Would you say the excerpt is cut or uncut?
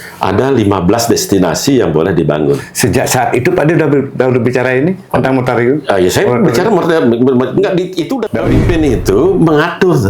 cut